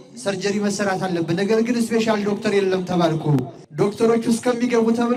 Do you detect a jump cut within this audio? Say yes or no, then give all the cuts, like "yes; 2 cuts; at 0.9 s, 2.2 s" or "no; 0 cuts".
no; 0 cuts